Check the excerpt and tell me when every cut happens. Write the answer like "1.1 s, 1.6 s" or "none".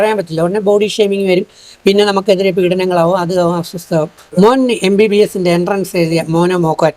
4.2 s